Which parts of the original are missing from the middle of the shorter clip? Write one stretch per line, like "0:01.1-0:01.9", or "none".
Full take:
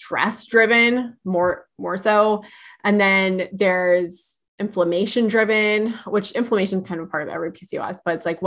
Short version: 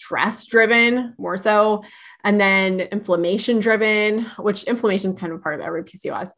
0:01.1-0:01.7
0:03.5-0:04.5